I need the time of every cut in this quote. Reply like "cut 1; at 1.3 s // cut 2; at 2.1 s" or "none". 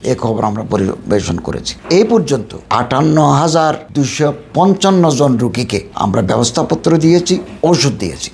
cut 1; at 1.7 s // cut 2; at 2.6 s